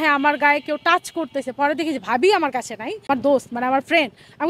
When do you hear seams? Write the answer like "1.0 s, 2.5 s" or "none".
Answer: 3.1 s